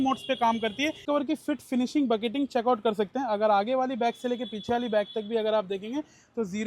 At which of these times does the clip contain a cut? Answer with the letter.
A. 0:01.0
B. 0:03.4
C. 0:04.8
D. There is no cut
A